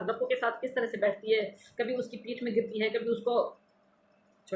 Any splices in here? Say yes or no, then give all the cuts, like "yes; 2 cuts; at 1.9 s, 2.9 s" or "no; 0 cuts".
no; 0 cuts